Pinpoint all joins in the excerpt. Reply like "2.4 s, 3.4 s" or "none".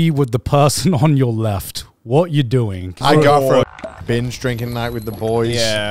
2.9 s